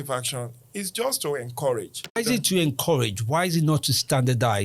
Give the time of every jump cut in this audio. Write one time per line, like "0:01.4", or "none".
0:02.2